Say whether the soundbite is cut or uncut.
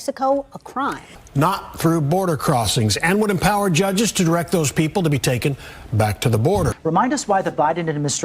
cut